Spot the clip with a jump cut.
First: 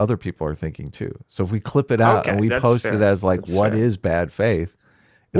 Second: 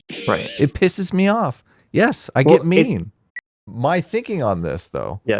second; 1 cut; at 3.5 s

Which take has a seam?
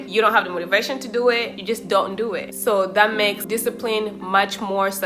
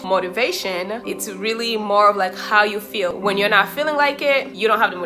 second; 2 cuts; at 1.0 s, 3.2 s

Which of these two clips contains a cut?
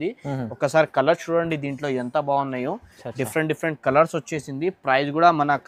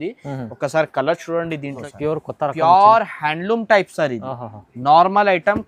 second; 1 cut; at 1.8 s

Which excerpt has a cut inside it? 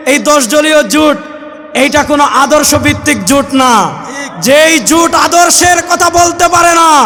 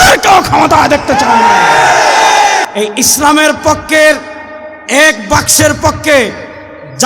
second; 1 cut; at 2.7 s

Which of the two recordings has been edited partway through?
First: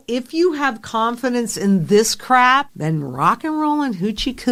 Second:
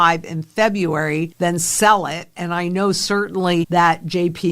second; 2 cuts; at 1.3 s, 3.7 s

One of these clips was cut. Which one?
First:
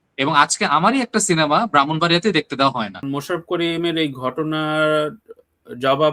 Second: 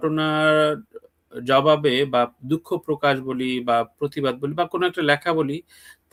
first; 1 cut; at 3.1 s

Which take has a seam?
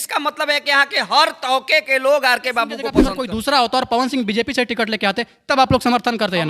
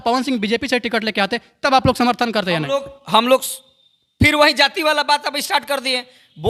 first; 1 cut; at 3.0 s

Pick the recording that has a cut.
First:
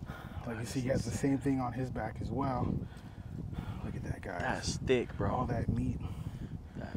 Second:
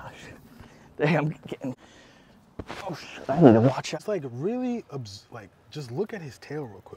second; 2 cuts; at 1.8 s, 4.0 s

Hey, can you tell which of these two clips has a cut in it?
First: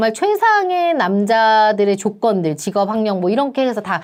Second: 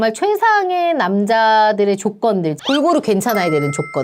second; 1 cut; at 2.6 s

